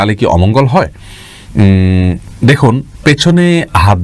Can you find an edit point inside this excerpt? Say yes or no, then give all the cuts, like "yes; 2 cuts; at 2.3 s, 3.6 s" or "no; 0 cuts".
no; 0 cuts